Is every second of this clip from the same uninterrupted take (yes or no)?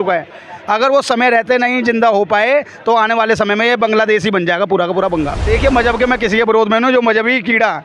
no